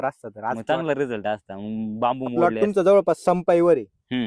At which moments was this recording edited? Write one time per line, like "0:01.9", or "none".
0:02.3